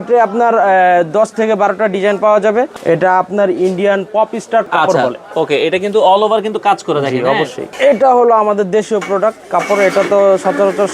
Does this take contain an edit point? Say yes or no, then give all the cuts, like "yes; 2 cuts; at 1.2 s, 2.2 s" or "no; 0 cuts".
yes; 3 cuts; at 2.7 s, 4.6 s, 7.6 s